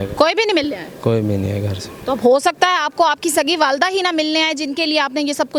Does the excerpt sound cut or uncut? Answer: uncut